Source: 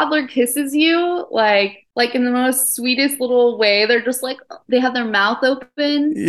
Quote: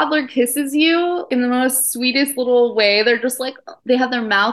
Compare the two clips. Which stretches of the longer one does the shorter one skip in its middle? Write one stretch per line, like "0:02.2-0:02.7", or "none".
0:01.3-0:02.1

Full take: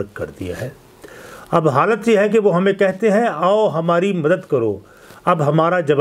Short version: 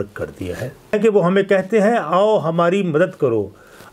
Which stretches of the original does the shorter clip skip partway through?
0:00.9-0:02.2

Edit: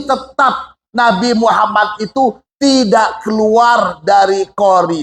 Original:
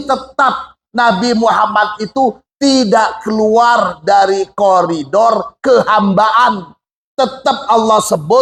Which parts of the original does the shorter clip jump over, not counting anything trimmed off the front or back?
none

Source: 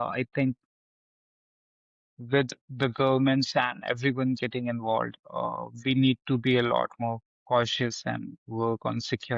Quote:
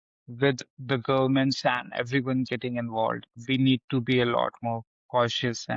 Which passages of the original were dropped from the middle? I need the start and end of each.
0:05.2-0:05.7

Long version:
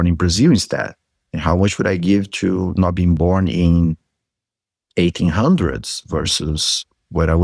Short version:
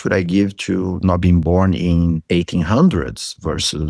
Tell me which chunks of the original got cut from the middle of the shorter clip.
0:04.0-0:04.9

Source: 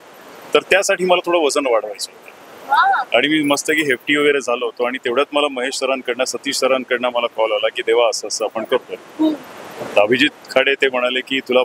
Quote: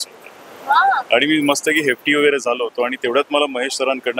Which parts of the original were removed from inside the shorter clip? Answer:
none

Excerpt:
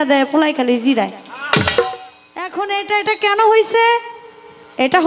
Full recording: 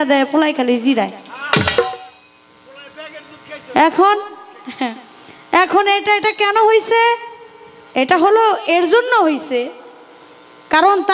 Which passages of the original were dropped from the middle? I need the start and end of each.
0:02.5-0:05.7

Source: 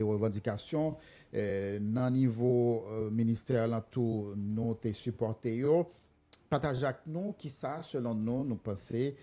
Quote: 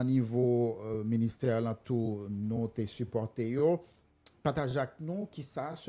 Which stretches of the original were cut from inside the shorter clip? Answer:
none

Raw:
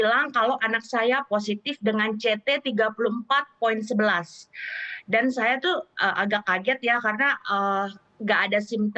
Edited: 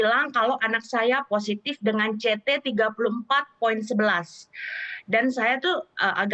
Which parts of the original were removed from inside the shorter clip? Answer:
none

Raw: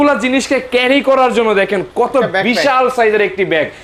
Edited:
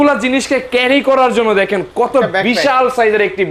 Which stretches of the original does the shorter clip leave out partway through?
none

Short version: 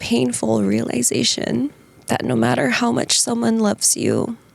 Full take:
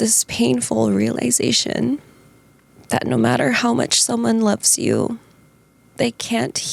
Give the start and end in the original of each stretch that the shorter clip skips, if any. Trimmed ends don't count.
0:02.2-0:02.7

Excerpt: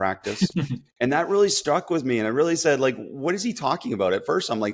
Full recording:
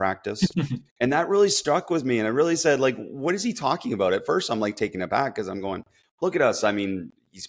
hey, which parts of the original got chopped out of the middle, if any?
none

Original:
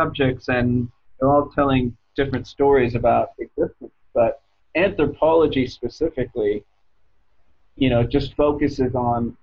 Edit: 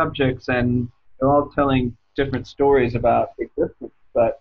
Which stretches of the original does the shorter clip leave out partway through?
none

